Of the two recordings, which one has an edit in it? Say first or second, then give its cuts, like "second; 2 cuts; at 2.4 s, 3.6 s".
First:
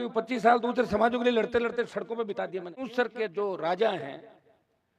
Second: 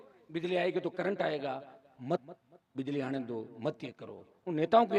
first; 1 cut; at 2.8 s